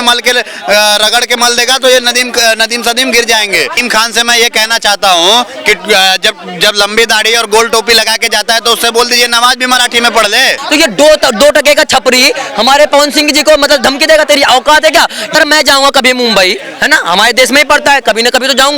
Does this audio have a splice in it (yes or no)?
yes